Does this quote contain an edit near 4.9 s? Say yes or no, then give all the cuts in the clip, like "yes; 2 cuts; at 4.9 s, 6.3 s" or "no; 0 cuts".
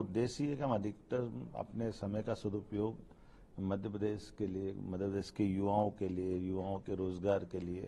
no; 0 cuts